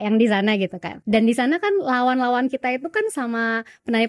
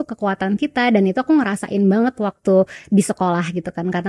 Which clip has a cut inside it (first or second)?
first